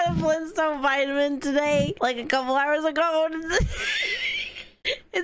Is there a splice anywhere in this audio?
no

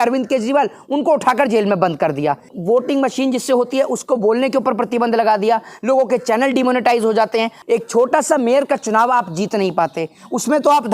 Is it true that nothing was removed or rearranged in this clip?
no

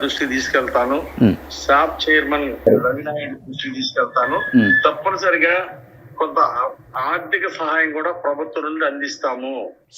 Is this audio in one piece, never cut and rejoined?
yes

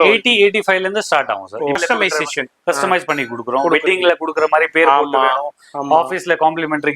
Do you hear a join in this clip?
yes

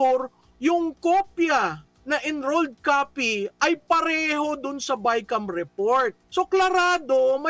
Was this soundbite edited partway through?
yes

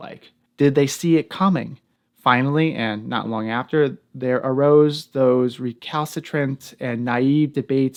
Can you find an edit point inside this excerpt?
no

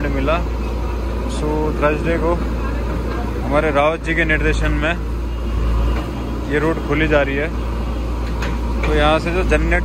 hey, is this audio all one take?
yes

